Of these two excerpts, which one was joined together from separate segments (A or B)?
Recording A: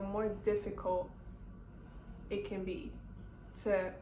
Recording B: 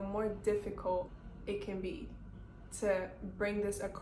B